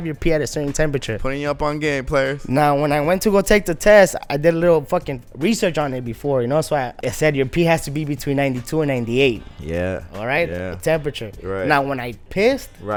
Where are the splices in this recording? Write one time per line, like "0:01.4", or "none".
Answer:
none